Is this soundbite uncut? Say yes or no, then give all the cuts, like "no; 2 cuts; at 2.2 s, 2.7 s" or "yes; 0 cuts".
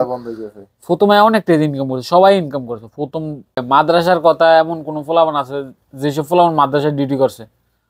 no; 1 cut; at 3.6 s